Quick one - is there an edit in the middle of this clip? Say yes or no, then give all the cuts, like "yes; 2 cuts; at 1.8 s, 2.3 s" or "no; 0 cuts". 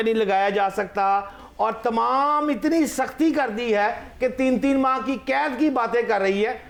no; 0 cuts